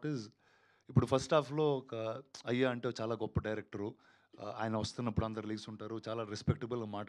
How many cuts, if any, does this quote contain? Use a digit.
0